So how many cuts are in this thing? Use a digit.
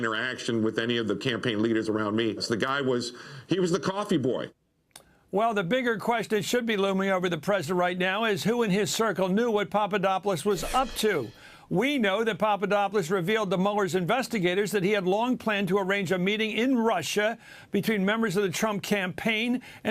1